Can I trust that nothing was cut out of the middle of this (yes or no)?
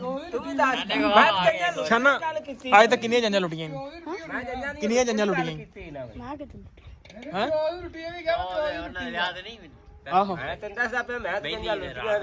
yes